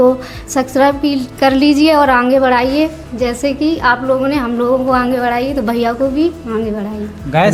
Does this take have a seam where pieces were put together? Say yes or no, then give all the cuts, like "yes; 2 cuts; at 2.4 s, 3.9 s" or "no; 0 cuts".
no; 0 cuts